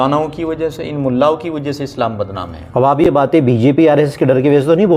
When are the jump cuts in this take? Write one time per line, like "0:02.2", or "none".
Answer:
none